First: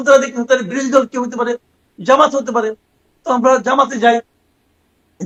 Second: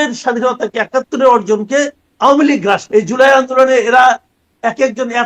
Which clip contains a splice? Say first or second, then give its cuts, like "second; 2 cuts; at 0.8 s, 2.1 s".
second; 1 cut; at 2.8 s